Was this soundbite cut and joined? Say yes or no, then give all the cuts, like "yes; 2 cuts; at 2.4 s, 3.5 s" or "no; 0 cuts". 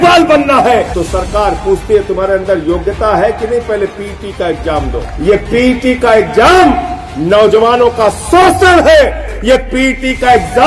yes; 3 cuts; at 0.9 s, 5.0 s, 9.3 s